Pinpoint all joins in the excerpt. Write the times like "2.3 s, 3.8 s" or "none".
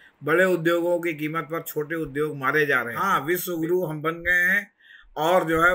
3.0 s